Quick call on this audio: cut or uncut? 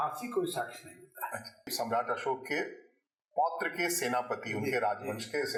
uncut